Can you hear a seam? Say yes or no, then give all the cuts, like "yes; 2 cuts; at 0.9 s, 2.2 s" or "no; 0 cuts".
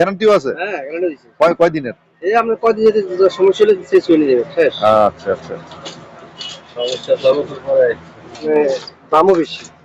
yes; 1 cut; at 8.5 s